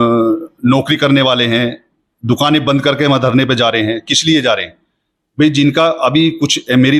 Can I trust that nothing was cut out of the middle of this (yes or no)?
yes